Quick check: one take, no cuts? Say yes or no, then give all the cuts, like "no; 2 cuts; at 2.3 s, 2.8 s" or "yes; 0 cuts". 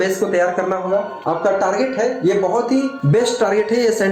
no; 2 cuts; at 1.2 s, 3.0 s